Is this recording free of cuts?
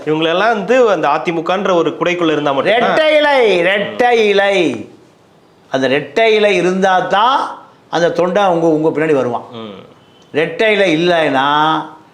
yes; 0 cuts

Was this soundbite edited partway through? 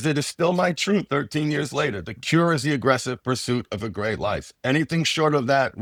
no; 0 cuts

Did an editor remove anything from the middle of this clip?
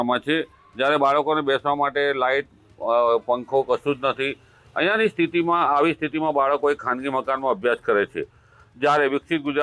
no; 0 cuts

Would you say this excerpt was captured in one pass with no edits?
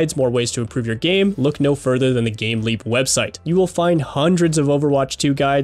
no; 1 cut; at 3.4 s

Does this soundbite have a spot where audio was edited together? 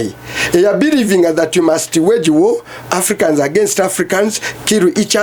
no; 0 cuts

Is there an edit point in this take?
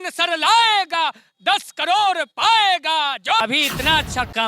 yes; 1 cut; at 3.4 s

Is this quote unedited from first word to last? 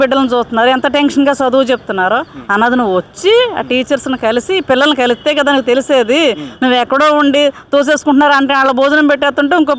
yes; 0 cuts

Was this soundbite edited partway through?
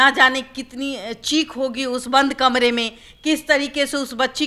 no; 0 cuts

